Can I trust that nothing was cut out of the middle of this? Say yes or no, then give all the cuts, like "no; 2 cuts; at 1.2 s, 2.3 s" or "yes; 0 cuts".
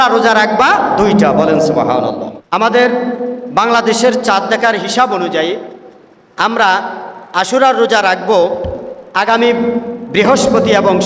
no; 1 cut; at 2.3 s